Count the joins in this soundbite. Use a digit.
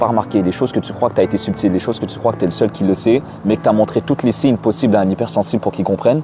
0